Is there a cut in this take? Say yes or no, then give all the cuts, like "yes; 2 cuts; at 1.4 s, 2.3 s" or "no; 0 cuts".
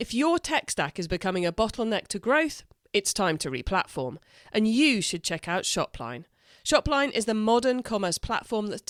no; 0 cuts